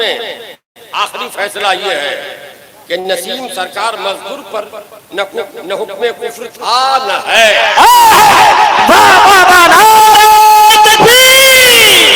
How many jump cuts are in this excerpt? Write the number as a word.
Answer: zero